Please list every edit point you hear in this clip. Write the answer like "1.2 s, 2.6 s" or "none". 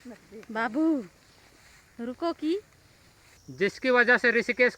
none

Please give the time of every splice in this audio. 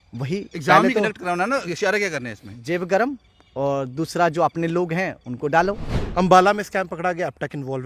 5.9 s

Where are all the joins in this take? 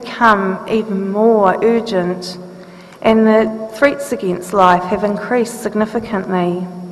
1.9 s

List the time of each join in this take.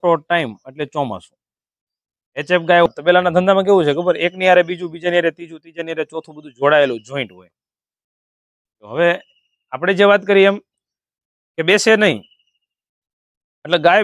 2.9 s

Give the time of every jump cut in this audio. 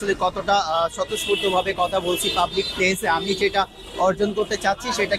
none

